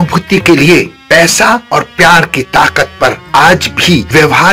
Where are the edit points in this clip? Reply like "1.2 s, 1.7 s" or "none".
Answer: none